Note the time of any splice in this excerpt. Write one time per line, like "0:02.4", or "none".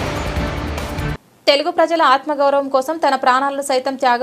0:01.1